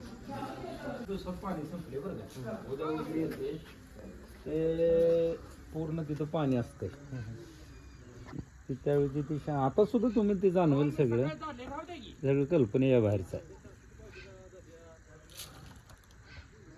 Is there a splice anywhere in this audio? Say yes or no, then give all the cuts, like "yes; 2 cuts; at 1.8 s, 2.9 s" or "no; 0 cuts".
yes; 1 cut; at 1.1 s